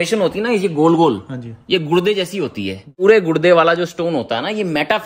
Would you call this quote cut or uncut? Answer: cut